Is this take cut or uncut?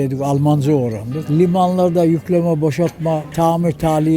cut